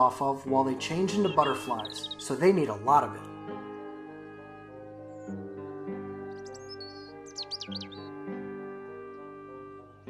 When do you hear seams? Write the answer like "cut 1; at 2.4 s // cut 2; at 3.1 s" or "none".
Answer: cut 1; at 3.1 s